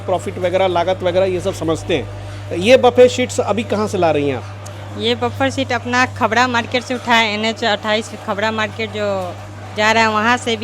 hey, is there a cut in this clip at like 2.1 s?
no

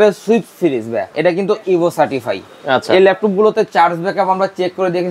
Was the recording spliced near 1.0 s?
yes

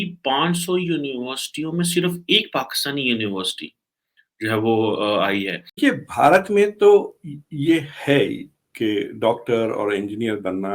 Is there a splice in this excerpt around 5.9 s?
yes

